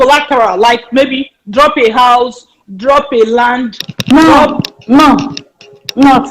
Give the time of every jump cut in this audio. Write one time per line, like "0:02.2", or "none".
none